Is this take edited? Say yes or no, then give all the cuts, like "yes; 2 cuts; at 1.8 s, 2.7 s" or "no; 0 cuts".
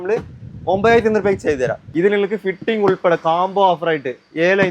yes; 1 cut; at 1.8 s